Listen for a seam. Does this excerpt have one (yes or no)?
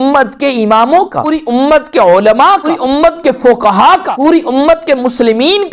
yes